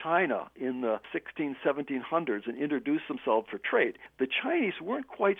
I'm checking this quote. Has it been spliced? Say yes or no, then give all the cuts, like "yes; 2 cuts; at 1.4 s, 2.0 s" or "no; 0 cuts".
yes; 2 cuts; at 1.1 s, 3.9 s